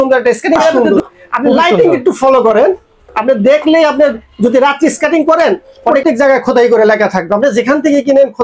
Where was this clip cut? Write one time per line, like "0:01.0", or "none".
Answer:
0:00.7
0:06.0